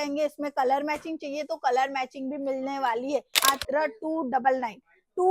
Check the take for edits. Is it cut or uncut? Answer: cut